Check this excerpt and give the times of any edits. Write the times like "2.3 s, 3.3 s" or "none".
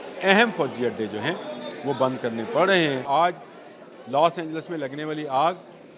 3.0 s